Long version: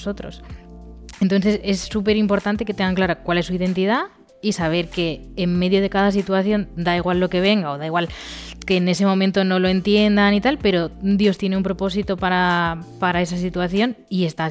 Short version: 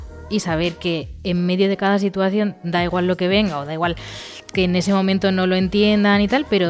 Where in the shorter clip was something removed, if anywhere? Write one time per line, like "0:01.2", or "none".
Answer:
none

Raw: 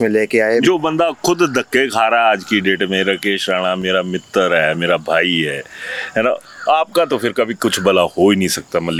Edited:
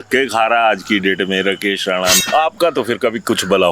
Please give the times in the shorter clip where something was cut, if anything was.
0:02.2

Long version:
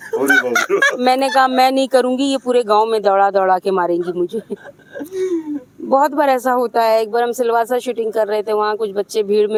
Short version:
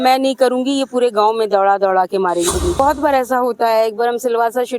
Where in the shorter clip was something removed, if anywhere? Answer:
0:02.8

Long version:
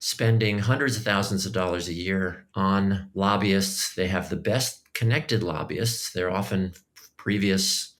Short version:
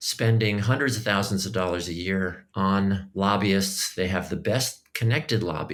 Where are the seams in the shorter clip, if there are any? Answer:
none

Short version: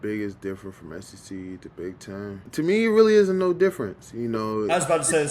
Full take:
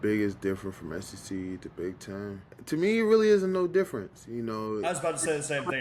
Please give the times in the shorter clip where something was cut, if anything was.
0:02.4

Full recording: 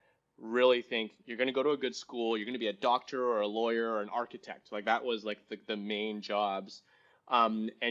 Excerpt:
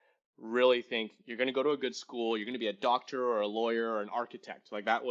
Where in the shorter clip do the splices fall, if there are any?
none

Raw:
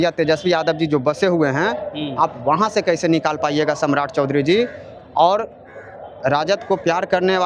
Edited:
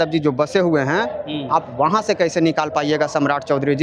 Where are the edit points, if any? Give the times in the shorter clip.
none

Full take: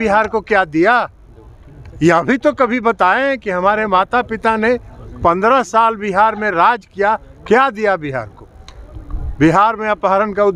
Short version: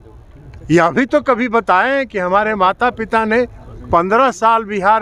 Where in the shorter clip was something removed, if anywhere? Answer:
none

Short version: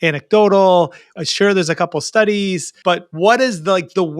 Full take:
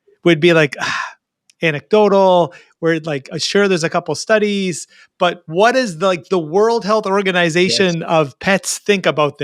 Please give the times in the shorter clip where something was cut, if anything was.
0:01.0
0:02.7

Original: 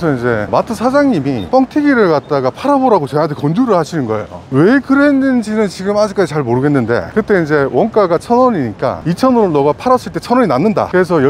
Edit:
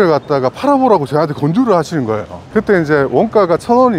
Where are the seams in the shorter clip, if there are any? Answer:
0:02.4

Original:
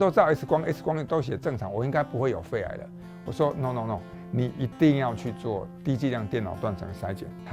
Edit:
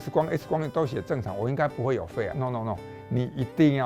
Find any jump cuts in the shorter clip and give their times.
0:02.3

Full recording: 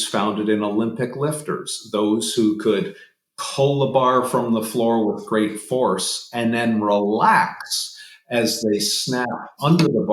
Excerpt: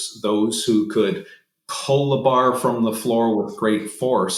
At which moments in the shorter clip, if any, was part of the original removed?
none

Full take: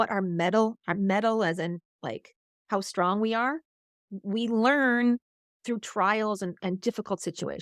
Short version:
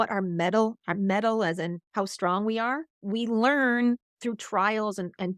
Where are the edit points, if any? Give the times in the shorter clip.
0:01.8
0:02.9
0:04.1

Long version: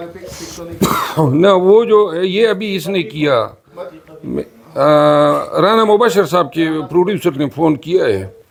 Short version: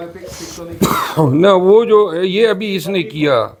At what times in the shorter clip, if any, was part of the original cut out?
none

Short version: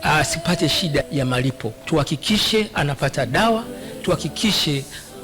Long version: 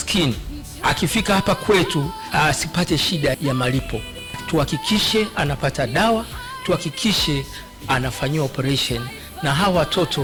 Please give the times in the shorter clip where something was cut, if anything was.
0:01.7

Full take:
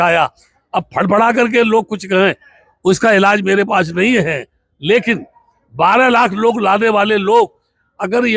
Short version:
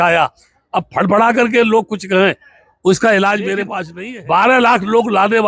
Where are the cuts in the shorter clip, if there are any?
0:03.8

